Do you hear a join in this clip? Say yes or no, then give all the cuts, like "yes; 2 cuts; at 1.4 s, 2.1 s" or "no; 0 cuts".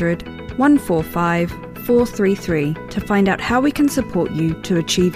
no; 0 cuts